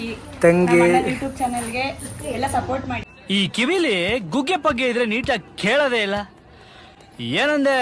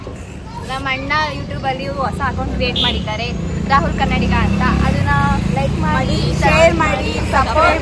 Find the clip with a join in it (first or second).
first